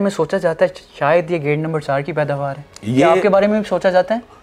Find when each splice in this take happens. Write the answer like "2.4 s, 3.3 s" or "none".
none